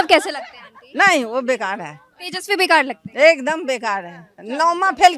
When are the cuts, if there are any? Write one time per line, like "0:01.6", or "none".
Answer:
none